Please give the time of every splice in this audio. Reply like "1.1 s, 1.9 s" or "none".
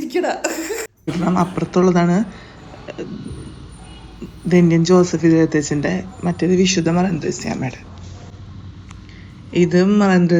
1.2 s